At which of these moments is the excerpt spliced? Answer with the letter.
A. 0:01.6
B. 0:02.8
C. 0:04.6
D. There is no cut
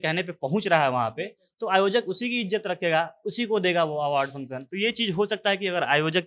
C